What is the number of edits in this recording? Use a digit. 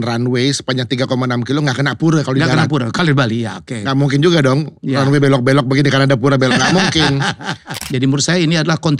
1